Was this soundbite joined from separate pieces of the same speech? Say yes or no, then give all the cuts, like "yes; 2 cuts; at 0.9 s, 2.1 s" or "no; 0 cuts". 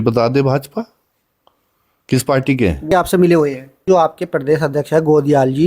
yes; 2 cuts; at 2.9 s, 3.8 s